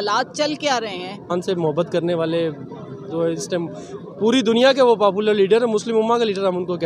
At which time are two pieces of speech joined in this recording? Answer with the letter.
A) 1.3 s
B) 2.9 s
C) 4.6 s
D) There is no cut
A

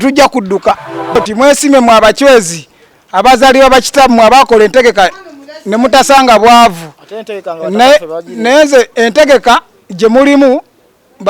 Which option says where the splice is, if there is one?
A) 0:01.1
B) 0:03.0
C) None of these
A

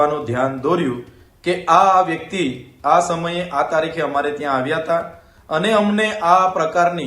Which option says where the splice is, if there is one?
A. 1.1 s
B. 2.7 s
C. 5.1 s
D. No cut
D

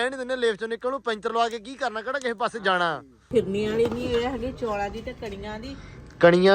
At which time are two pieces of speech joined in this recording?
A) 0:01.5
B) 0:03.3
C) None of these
B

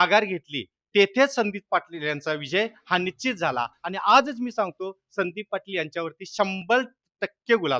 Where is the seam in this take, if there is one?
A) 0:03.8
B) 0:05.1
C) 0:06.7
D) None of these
D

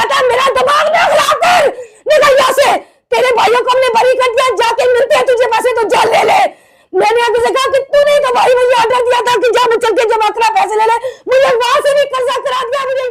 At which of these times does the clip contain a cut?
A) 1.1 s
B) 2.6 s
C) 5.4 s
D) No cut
D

